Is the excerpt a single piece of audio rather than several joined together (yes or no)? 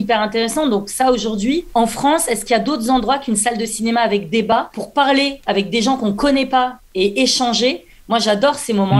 no